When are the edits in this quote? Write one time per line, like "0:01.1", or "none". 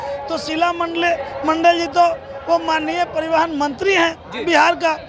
none